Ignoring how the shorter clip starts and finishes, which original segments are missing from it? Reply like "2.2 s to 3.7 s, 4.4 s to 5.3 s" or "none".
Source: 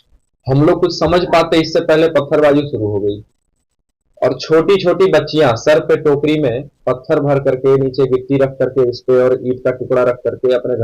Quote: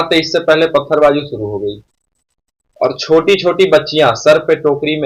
none